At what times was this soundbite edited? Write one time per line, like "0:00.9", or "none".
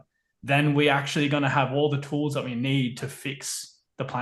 none